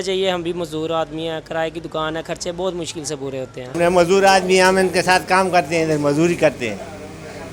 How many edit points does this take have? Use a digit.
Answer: 0